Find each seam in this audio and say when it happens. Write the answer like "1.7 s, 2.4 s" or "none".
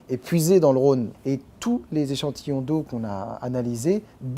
1.1 s